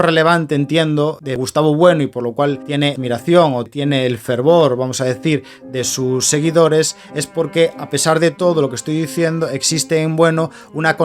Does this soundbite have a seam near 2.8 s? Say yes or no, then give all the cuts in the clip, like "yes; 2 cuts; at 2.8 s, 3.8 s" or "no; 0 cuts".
yes; 3 cuts; at 1.2 s, 2.8 s, 3.7 s